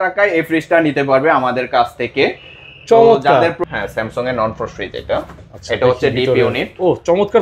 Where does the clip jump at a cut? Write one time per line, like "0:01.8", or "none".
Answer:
0:03.6